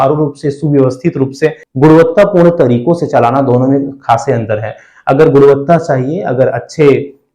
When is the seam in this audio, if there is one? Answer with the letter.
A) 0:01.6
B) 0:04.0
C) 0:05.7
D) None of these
A